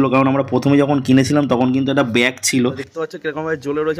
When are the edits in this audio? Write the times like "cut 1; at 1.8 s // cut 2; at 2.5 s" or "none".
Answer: cut 1; at 2.9 s

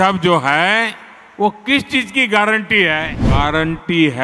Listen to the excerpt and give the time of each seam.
cut 1; at 3.2 s

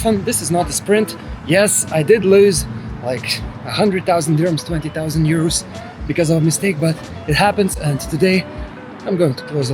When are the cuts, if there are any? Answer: none

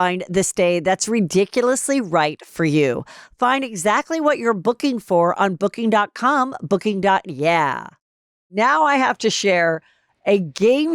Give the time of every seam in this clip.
cut 1; at 8.5 s

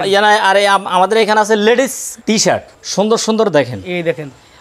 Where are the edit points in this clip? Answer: cut 1; at 2.5 s

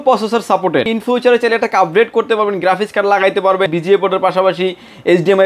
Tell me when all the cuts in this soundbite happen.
cut 1; at 0.9 s // cut 2; at 3.7 s

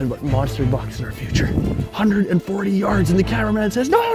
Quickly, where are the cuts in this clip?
cut 1; at 1.9 s

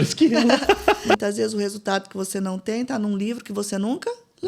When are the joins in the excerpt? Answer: cut 1; at 1.2 s

